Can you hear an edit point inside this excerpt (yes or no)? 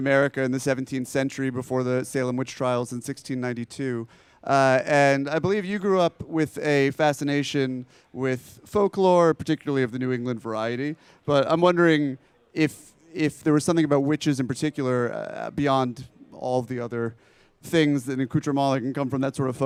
no